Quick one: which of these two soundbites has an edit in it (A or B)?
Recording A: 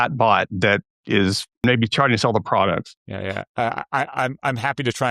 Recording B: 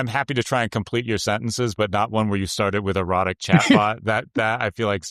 A